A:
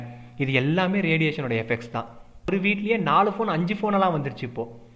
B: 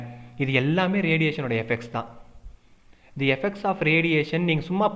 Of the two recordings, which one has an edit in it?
A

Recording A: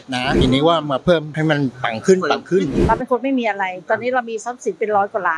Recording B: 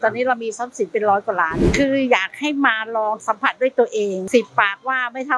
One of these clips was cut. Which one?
A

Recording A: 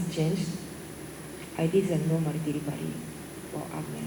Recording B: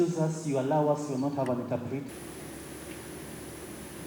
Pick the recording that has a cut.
B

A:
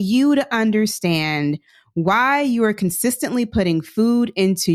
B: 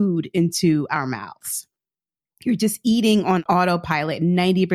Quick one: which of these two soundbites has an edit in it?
B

